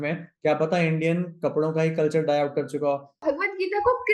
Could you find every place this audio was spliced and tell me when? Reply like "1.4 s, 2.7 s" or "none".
3.1 s